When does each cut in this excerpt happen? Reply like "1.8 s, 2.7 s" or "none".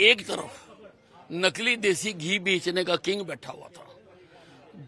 none